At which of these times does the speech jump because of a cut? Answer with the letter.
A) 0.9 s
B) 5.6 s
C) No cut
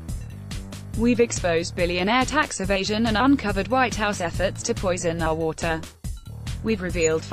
A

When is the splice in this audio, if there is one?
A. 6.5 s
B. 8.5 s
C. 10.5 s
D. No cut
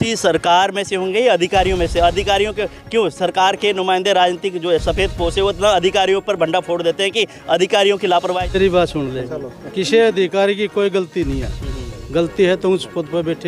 B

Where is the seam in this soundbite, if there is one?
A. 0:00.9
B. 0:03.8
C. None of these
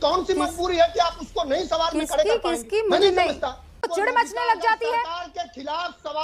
B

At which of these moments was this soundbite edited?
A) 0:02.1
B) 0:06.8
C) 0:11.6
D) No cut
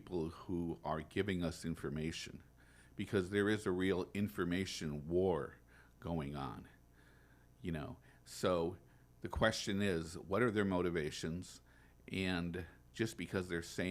D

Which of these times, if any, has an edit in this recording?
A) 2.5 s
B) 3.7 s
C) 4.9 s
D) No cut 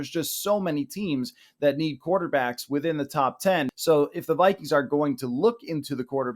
B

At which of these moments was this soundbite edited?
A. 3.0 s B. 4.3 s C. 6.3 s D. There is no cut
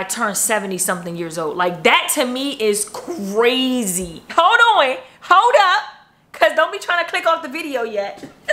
B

